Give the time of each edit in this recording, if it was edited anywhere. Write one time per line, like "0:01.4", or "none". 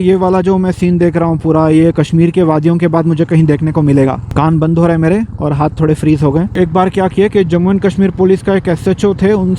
0:04.2
0:06.5